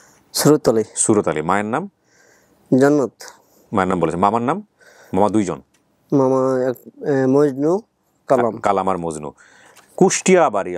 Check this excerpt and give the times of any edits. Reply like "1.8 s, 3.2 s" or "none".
none